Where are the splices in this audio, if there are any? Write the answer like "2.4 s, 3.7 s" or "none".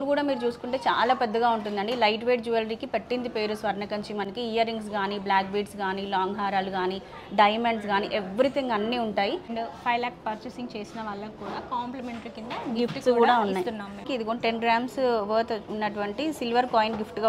9.5 s, 14.0 s